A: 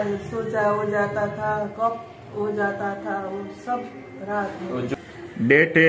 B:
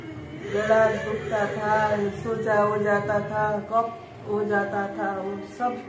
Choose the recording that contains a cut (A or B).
A